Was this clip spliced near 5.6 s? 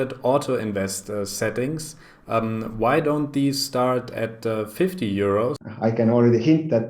yes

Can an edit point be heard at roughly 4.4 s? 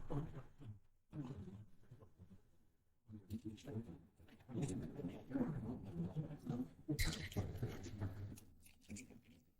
no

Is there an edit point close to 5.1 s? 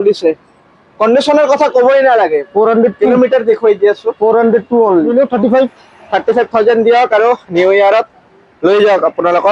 yes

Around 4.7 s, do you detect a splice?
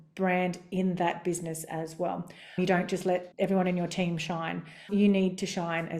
no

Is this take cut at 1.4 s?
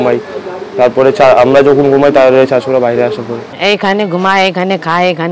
no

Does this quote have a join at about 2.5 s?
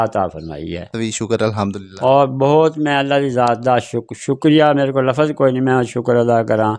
no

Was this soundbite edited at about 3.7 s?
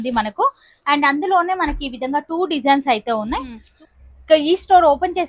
yes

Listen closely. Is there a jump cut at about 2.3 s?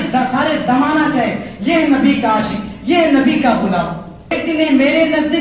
no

